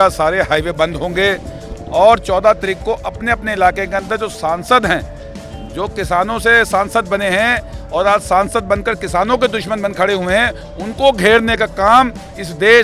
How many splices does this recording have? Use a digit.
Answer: 0